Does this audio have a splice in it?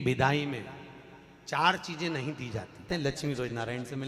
yes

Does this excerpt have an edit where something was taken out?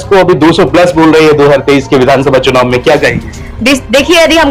no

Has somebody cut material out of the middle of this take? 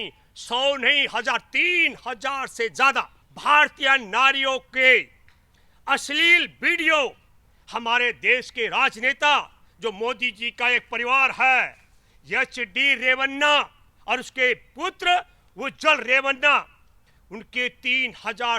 yes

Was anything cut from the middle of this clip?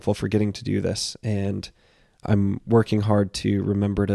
yes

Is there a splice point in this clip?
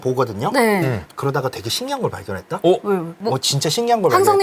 no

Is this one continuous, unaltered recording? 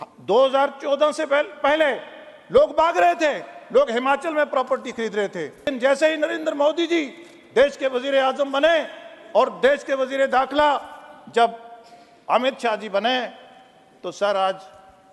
no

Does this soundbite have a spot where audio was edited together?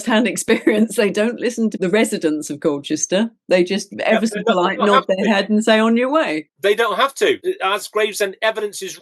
yes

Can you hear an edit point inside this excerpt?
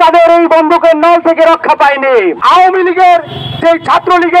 yes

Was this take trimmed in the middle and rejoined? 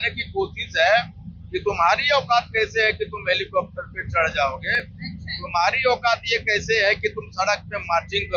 no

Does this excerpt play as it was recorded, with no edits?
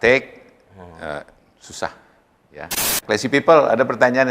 no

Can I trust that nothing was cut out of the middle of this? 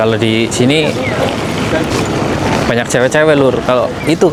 yes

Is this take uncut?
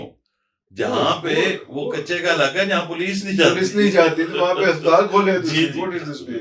yes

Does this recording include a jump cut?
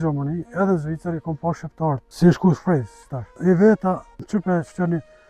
yes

